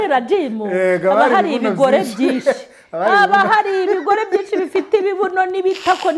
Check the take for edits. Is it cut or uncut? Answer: uncut